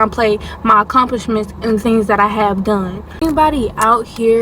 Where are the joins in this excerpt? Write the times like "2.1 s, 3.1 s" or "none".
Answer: 3.2 s

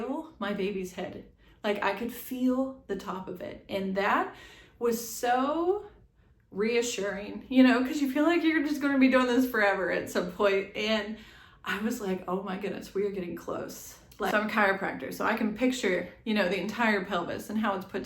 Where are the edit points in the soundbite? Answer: 14.3 s

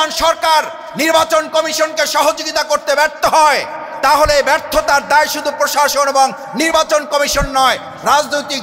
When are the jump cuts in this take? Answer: none

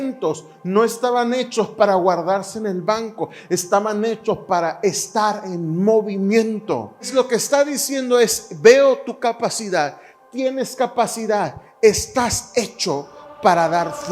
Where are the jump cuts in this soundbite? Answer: 7.1 s

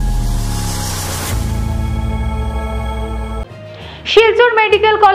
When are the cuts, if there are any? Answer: 3.4 s

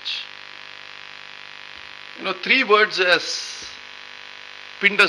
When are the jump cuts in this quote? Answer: none

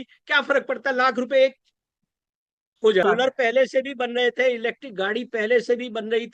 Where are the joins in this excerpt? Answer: 3.0 s

